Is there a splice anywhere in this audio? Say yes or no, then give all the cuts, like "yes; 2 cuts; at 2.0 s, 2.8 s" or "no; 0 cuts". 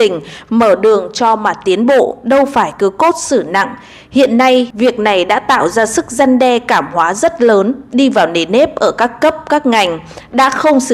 yes; 1 cut; at 4.7 s